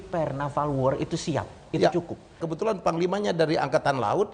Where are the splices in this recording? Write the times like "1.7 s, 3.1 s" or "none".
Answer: 2.4 s